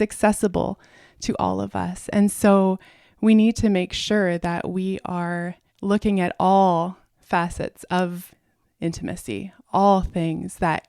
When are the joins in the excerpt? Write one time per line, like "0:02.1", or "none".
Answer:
0:05.6
0:07.1

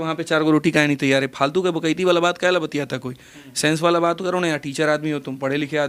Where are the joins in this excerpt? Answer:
none

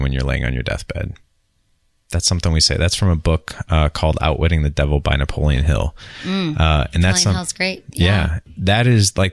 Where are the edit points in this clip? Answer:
0:08.4

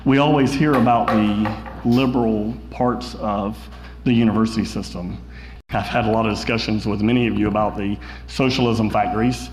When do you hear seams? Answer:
0:05.5

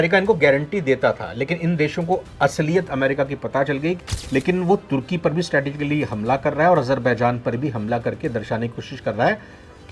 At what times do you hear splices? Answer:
0:04.0

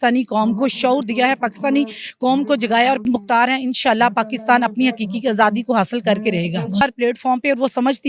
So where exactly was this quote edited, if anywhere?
0:03.0
0:06.8

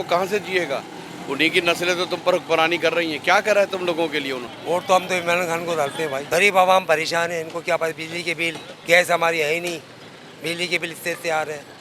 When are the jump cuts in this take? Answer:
0:04.5
0:06.2

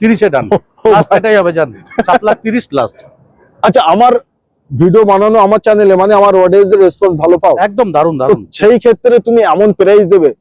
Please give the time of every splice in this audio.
none

